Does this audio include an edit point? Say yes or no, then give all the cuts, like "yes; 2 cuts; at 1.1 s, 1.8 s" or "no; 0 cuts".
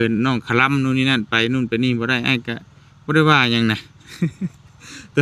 no; 0 cuts